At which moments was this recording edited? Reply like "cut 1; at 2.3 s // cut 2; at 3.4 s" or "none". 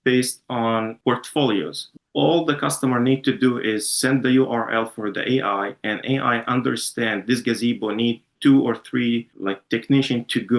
cut 1; at 0.9 s // cut 2; at 1.8 s